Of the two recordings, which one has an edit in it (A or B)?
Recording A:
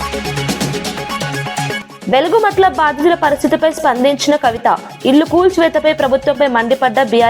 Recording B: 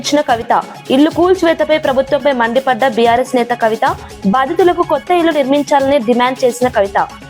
A